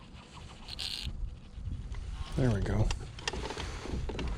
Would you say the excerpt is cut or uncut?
uncut